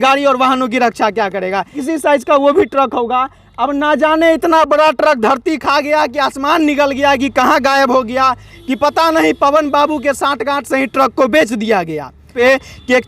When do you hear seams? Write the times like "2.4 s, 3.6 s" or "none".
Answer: 1.8 s, 12.3 s